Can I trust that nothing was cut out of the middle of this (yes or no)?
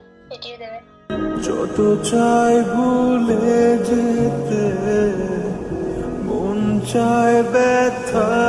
yes